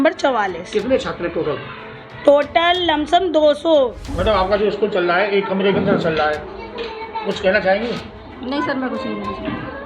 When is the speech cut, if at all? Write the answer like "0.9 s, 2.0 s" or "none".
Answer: 4.0 s